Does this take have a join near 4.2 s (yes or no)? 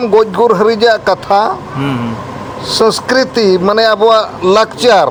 no